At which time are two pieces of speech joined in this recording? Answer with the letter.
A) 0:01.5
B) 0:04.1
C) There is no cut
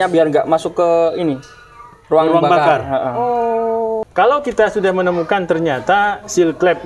B